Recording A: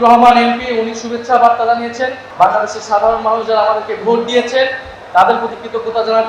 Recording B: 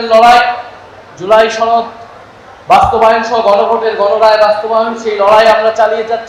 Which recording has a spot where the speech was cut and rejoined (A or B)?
A